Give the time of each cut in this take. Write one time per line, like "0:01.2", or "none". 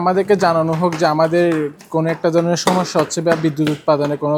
none